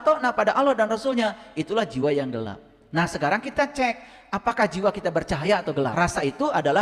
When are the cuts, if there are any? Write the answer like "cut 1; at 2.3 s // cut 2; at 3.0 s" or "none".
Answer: cut 1; at 5.9 s

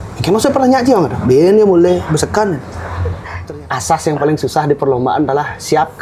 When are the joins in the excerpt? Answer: cut 1; at 3.3 s

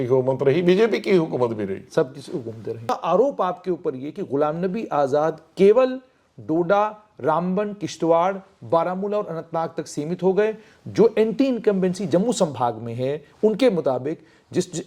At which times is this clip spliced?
cut 1; at 3.0 s

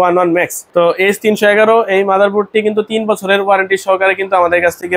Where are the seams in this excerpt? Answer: none

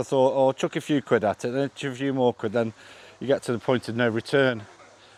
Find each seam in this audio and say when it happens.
none

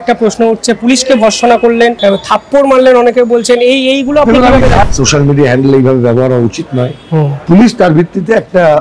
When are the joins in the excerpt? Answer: cut 1; at 2.0 s // cut 2; at 4.8 s // cut 3; at 7.4 s

